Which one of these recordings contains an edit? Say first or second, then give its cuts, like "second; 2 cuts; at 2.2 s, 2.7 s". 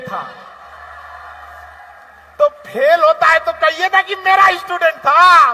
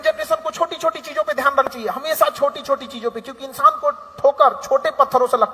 second; 1 cut; at 1.7 s